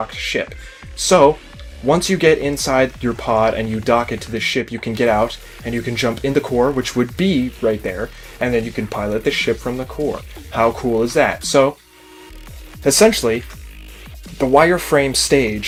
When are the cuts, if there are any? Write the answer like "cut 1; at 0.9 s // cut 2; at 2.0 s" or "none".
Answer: none